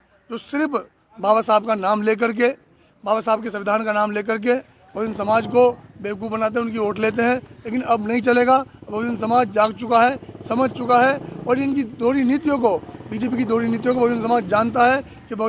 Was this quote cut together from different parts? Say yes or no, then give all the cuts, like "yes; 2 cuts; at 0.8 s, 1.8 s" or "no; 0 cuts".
no; 0 cuts